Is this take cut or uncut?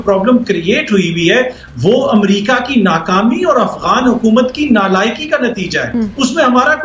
uncut